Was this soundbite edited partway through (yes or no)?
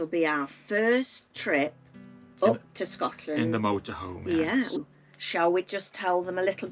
yes